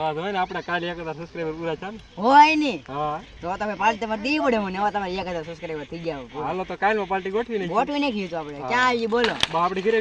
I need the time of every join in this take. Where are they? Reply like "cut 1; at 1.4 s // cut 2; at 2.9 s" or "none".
none